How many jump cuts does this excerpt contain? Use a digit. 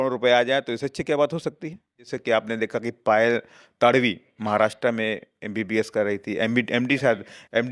1